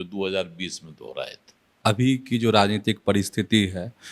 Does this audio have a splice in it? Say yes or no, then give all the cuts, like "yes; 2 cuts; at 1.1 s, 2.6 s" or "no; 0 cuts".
yes; 1 cut; at 1.7 s